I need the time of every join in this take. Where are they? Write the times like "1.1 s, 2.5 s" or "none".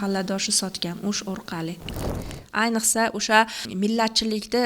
2.1 s, 3.6 s